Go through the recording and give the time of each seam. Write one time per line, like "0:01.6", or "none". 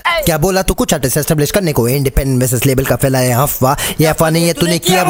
none